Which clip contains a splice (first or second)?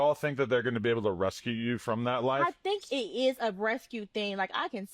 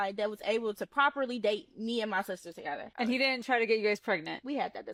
first